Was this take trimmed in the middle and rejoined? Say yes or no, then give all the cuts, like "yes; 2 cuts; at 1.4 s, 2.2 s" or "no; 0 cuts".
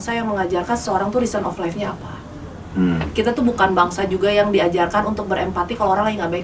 no; 0 cuts